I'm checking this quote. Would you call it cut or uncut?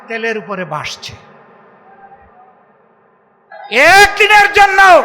cut